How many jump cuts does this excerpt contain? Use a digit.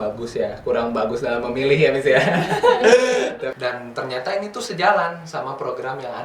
1